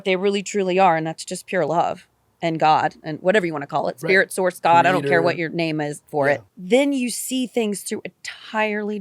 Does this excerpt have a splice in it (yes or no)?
yes